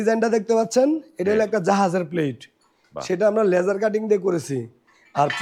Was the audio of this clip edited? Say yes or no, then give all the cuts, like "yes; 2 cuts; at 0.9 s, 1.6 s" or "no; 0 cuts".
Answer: no; 0 cuts